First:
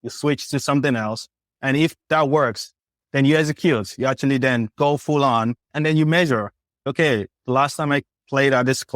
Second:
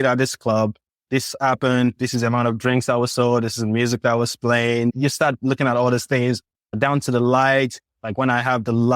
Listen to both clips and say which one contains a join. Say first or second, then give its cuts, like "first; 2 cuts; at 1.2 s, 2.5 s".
first; 3 cuts; at 2.0 s, 2.9 s, 5.7 s